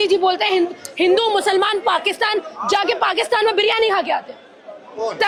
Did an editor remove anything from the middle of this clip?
no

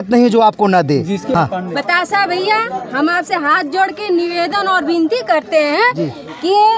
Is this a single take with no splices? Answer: no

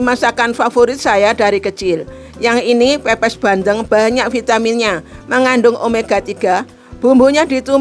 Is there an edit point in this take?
no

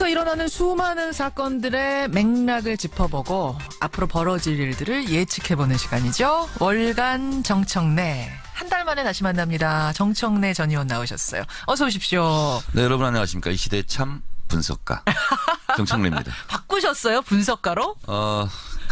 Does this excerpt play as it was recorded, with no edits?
yes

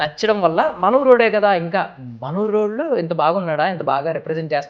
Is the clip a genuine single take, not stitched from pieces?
yes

